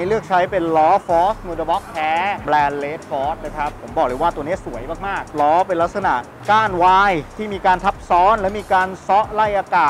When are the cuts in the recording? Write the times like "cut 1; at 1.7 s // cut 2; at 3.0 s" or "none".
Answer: cut 1; at 2.4 s // cut 2; at 5.3 s